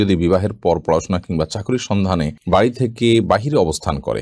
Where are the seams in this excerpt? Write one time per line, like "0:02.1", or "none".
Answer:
0:02.4